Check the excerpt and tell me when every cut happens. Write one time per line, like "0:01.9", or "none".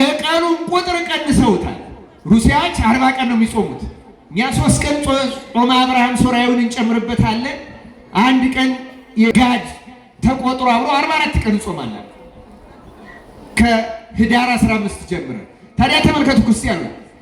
0:09.3